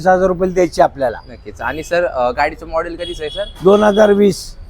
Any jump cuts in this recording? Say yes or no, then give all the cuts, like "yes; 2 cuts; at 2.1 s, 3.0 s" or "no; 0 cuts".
no; 0 cuts